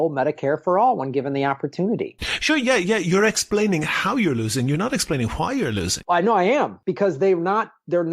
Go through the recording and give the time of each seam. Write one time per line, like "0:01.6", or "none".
0:02.4
0:05.9
0:06.8